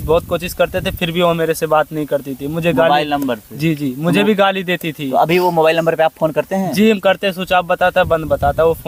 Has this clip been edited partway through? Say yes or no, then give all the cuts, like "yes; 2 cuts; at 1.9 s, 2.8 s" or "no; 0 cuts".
no; 0 cuts